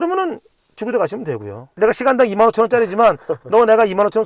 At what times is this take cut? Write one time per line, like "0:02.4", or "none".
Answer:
0:01.6